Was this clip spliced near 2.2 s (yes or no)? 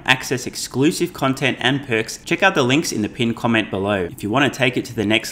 yes